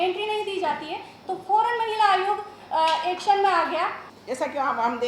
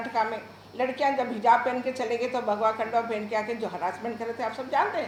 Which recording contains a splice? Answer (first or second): first